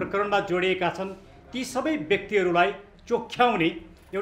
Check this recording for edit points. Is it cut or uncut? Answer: uncut